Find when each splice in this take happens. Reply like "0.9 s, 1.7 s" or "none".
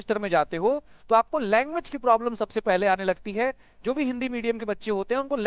none